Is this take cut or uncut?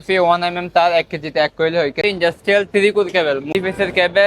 cut